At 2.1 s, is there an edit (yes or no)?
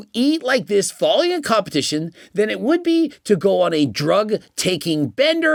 no